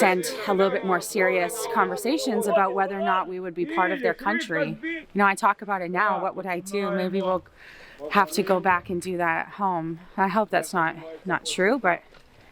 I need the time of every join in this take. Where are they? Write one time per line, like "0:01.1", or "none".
none